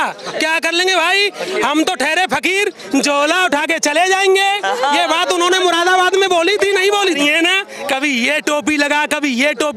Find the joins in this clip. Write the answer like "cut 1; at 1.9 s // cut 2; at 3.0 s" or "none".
cut 1; at 7.0 s